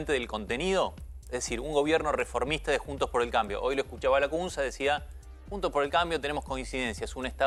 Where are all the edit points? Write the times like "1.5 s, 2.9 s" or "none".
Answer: none